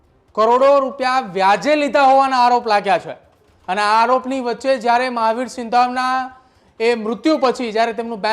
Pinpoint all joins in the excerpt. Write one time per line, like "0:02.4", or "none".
none